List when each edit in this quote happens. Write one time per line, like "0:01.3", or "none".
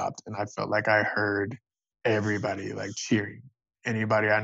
none